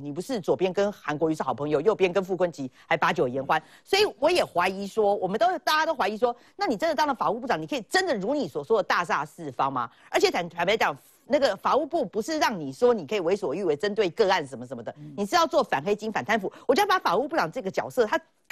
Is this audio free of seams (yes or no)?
yes